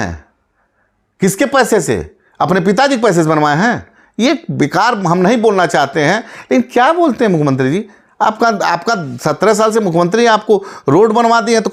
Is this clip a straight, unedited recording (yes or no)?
yes